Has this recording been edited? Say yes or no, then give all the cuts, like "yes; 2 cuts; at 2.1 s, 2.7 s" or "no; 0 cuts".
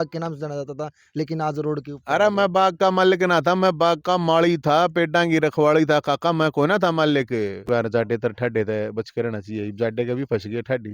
yes; 1 cut; at 7.6 s